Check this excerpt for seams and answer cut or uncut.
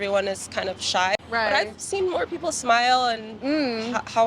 cut